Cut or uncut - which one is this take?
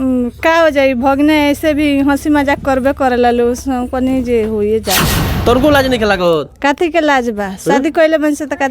cut